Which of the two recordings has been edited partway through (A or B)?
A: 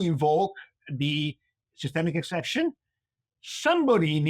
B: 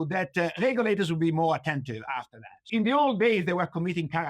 B